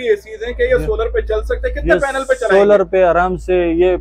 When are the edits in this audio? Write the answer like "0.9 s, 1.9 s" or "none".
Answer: none